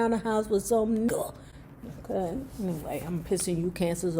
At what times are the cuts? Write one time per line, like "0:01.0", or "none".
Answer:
0:01.1